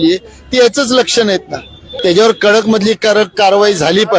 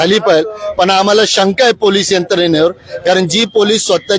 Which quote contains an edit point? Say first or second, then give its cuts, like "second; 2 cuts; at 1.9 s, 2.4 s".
first; 1 cut; at 1.8 s